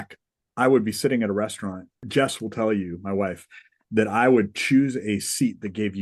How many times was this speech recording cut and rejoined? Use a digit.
1